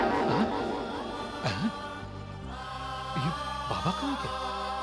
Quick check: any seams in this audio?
no; 0 cuts

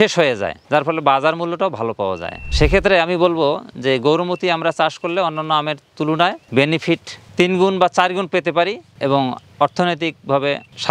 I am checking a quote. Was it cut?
no; 0 cuts

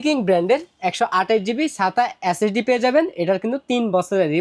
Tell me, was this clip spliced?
no; 0 cuts

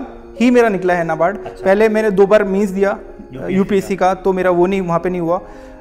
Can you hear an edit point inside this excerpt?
no; 0 cuts

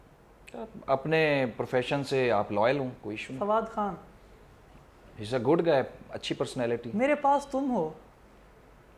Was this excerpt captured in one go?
yes; 0 cuts

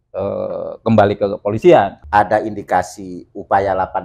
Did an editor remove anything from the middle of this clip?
yes; 1 cut; at 2.0 s

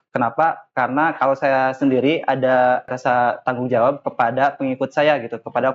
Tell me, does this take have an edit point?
yes; 1 cut; at 2.9 s

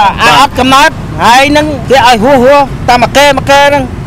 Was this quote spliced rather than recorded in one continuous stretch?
yes; 1 cut; at 1.8 s

